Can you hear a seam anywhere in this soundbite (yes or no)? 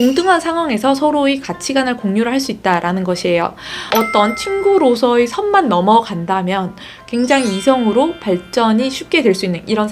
yes